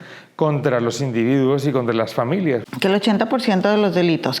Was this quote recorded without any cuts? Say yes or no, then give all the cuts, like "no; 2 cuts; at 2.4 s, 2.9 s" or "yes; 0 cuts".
no; 1 cut; at 2.6 s